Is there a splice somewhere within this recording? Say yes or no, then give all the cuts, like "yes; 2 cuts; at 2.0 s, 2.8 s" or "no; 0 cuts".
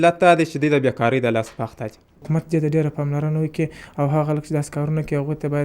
yes; 1 cut; at 2.2 s